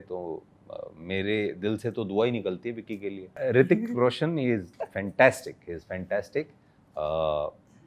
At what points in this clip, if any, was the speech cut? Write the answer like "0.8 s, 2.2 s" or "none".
3.3 s